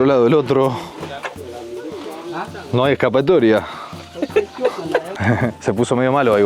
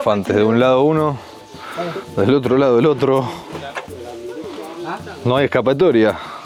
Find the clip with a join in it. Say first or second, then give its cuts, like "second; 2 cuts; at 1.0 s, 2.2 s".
first; 1 cut; at 5.1 s